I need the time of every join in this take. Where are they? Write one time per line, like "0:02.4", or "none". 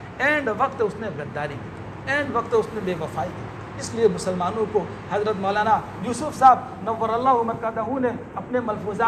none